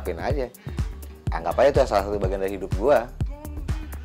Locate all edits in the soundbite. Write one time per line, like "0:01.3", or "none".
0:03.0